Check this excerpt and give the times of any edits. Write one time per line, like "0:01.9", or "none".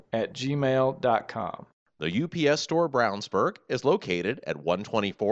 0:01.7